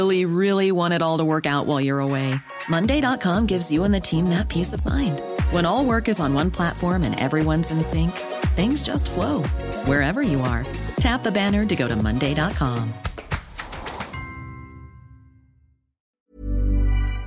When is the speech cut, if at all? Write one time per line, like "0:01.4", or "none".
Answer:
0:16.1